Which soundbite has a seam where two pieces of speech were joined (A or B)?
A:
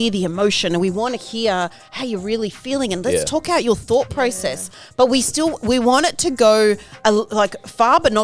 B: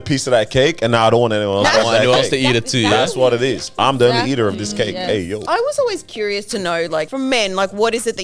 B